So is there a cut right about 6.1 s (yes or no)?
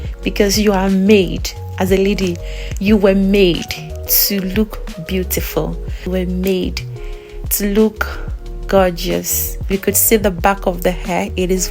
yes